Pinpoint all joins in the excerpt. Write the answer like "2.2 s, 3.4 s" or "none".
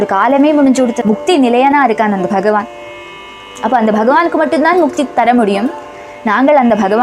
1.0 s